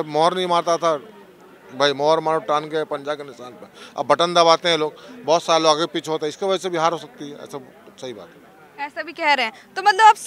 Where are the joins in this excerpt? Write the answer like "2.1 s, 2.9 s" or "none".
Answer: none